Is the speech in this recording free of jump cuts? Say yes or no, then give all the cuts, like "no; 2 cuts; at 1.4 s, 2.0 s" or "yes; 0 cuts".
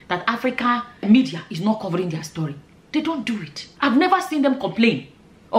yes; 0 cuts